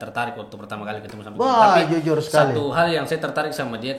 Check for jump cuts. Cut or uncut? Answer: uncut